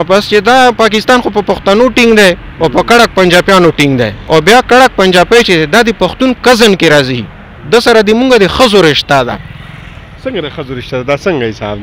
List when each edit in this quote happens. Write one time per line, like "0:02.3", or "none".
0:04.2